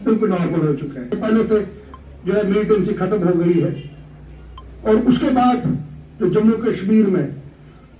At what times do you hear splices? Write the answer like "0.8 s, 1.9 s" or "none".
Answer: 1.1 s